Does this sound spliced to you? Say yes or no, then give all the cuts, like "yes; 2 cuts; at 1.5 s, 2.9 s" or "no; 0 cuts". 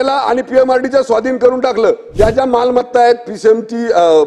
yes; 1 cut; at 2.0 s